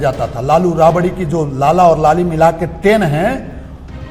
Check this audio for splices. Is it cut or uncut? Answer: uncut